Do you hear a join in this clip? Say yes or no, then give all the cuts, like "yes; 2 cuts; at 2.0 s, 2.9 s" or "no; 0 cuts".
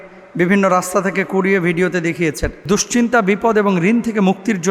yes; 1 cut; at 2.5 s